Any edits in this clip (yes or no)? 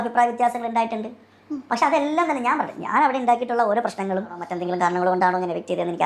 yes